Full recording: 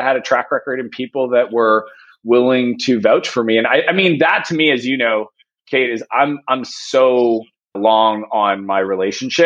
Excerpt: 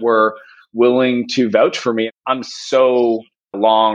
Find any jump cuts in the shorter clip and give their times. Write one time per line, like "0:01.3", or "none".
0:02.1